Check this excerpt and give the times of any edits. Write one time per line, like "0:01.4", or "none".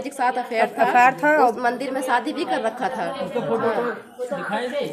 none